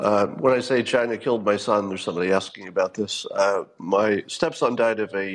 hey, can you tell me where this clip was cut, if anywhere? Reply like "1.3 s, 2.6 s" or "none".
none